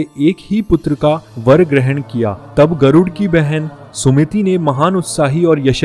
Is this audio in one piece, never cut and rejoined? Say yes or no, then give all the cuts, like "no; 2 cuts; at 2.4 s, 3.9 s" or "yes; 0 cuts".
yes; 0 cuts